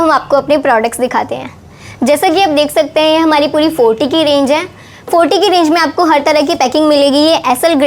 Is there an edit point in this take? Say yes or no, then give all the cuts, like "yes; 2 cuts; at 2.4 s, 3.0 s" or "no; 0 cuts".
no; 0 cuts